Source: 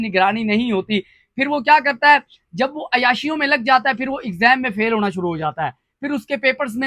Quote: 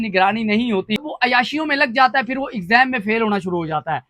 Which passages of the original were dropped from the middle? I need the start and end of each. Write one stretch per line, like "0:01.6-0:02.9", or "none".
0:01.1-0:02.8

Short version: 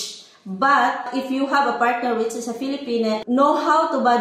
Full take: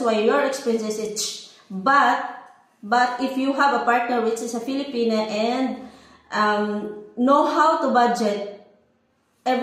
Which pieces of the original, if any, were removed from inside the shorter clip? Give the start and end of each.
0:02.3-0:03.1
0:05.3-0:07.1

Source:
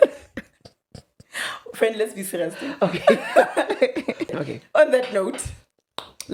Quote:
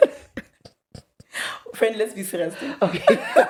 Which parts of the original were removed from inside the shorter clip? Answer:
none

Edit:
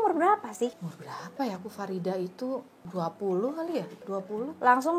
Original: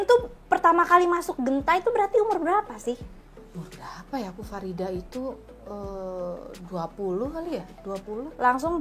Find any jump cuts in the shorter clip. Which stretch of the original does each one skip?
0:03.2-0:03.6
0:05.5-0:06.5

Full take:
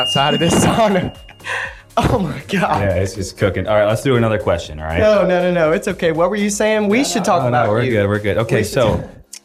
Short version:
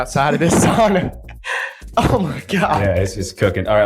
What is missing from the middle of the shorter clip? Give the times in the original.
none

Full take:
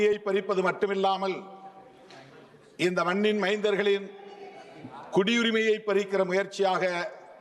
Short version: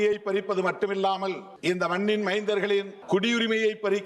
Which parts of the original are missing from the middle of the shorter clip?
0:01.5-0:02.6
0:04.1-0:05.0

